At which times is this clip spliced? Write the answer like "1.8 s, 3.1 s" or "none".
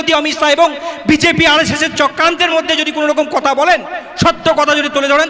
none